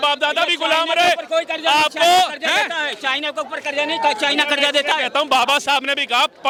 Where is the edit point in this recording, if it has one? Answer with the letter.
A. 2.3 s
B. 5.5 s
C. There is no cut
C